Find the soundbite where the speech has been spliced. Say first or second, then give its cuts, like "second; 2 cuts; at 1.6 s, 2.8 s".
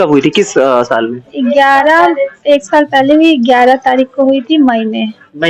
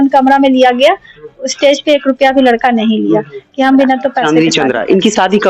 second; 1 cut; at 4.2 s